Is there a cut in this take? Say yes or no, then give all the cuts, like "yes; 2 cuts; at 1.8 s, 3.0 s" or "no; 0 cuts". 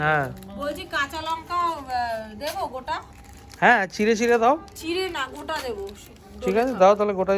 no; 0 cuts